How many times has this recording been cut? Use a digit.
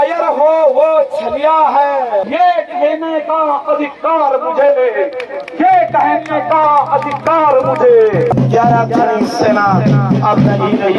2